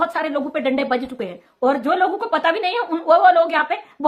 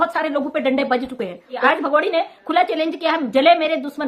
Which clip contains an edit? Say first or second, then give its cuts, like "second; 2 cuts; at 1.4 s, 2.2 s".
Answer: second; 1 cut; at 1.6 s